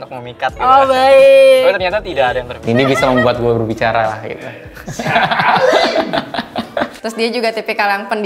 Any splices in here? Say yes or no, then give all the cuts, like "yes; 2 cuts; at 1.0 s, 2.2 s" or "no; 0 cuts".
yes; 2 cuts; at 2.5 s, 7.0 s